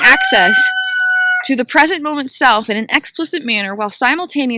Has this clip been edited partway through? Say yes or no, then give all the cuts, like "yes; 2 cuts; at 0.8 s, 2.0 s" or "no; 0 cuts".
no; 0 cuts